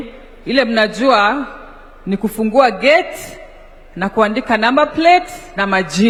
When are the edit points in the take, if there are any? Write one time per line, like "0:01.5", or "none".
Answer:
none